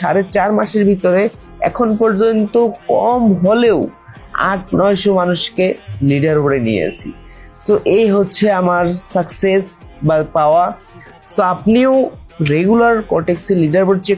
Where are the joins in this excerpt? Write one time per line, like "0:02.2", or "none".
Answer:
none